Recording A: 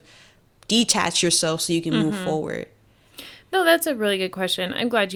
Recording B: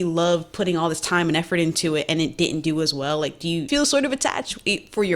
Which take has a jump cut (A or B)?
B